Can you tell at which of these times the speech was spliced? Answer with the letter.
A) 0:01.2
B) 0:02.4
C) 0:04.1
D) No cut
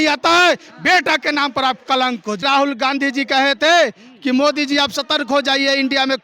B